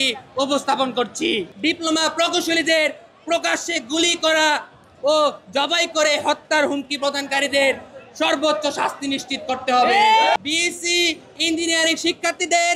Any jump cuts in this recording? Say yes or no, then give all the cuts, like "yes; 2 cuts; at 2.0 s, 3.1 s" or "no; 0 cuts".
yes; 2 cuts; at 1.5 s, 10.4 s